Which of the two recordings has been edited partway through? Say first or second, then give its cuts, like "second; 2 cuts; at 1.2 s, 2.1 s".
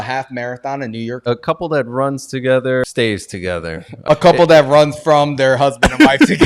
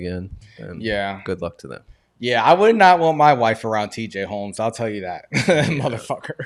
first; 3 cuts; at 1.2 s, 2.8 s, 4.0 s